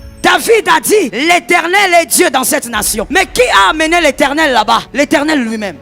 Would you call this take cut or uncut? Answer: cut